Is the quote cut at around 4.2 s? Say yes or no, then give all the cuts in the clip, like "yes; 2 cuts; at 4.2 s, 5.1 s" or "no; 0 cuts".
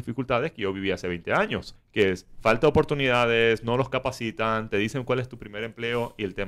no; 1 cut; at 1.7 s